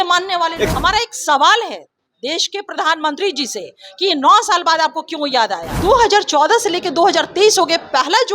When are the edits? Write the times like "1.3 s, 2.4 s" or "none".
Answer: 0.7 s, 5.7 s